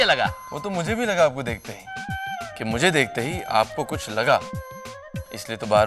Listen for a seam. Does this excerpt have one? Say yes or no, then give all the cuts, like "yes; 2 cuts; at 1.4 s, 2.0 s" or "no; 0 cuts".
no; 0 cuts